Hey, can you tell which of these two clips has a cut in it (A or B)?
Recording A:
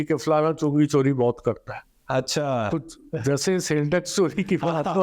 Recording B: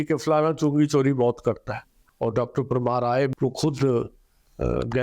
B